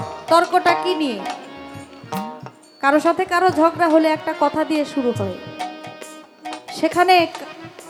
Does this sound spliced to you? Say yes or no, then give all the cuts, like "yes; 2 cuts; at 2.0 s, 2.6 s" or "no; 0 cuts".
no; 0 cuts